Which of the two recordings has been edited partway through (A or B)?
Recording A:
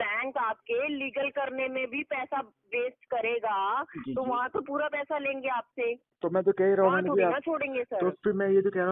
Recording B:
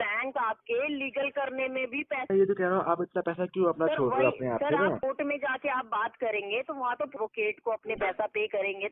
B